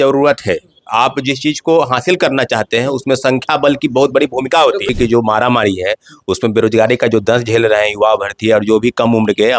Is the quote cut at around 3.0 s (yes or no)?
no